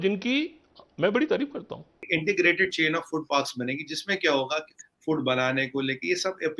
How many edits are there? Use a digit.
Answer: 2